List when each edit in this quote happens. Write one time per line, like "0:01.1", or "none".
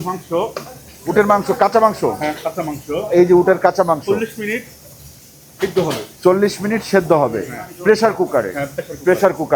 none